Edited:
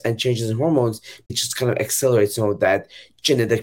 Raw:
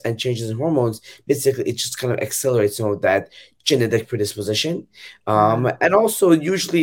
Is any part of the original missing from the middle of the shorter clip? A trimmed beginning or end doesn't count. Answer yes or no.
yes